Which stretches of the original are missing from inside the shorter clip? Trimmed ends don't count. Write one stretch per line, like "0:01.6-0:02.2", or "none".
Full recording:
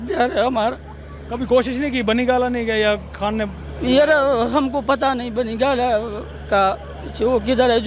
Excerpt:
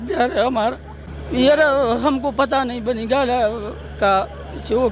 0:01.1-0:03.6